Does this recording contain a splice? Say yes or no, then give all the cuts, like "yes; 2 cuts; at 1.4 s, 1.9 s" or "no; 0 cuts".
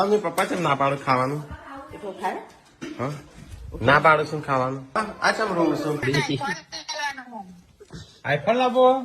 yes; 2 cuts; at 4.8 s, 6.0 s